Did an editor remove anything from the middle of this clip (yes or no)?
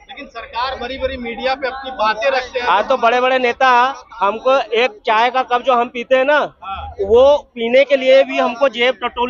no